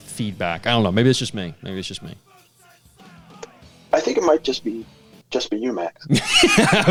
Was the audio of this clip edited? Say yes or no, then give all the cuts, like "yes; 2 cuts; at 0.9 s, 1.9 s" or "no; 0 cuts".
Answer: no; 0 cuts